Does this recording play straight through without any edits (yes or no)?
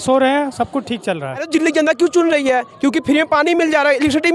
no